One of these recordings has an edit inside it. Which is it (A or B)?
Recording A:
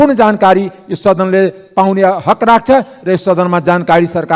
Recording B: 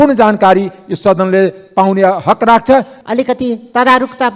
B